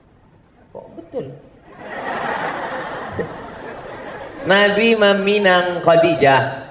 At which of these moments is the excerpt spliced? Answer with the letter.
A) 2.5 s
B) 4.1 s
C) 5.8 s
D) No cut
D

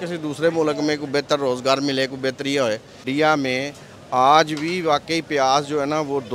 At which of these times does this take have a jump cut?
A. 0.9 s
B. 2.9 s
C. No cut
B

